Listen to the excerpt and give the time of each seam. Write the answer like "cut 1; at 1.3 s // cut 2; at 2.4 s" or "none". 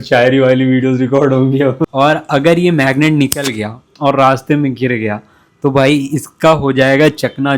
cut 1; at 1.9 s